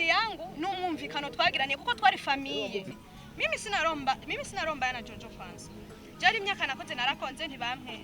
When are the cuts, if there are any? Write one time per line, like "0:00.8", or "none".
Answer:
0:02.9